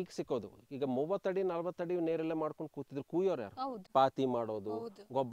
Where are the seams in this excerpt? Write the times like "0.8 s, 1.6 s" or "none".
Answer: 3.8 s